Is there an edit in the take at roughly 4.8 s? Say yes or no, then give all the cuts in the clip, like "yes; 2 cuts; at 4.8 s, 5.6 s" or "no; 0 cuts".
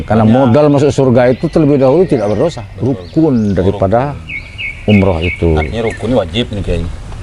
no; 1 cut; at 2.7 s